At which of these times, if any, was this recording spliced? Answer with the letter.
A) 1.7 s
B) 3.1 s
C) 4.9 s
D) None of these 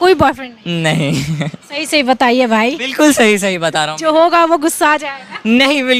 D